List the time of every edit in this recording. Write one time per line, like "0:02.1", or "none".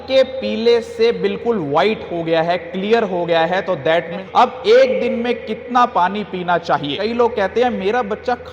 0:04.2
0:07.1